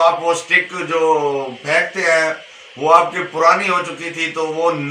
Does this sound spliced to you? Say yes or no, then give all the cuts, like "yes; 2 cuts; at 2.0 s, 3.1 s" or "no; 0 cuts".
no; 0 cuts